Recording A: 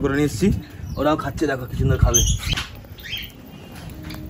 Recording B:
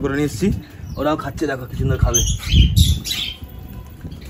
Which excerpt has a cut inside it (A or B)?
A